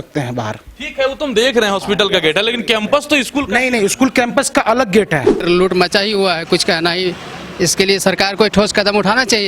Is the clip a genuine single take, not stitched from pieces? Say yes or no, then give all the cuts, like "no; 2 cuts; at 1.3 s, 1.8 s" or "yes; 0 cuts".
no; 1 cut; at 5.4 s